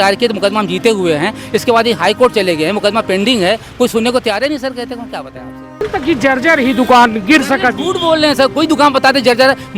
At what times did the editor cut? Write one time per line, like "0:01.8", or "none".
0:05.8